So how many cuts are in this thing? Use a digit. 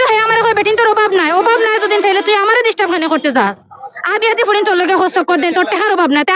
0